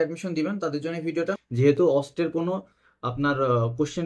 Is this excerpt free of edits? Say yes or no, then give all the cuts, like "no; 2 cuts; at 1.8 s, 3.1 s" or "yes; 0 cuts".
no; 1 cut; at 1.4 s